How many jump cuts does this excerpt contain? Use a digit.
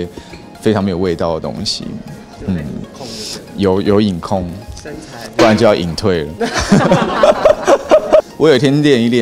1